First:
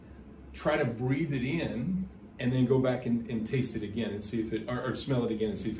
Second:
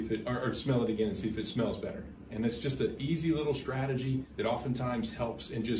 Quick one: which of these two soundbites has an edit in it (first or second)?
second